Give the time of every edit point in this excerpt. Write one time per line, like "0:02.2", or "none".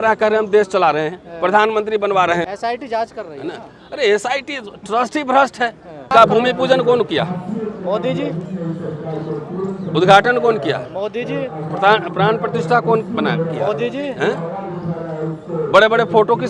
0:02.5
0:06.1